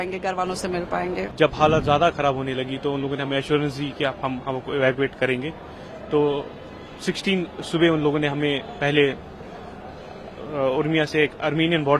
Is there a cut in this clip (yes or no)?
yes